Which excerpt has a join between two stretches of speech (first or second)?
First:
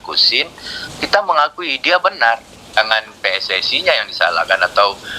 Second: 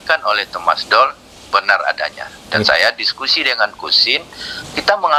first